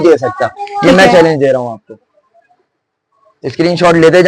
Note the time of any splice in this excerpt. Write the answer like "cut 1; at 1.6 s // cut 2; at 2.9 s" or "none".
cut 1; at 1.8 s